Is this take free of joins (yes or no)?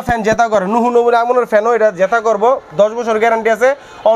yes